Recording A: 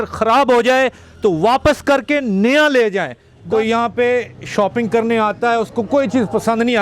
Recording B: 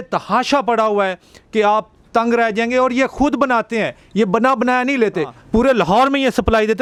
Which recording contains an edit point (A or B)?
A